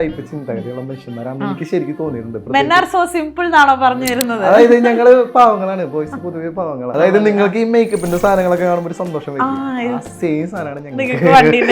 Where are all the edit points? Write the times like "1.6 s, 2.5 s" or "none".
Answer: 6.9 s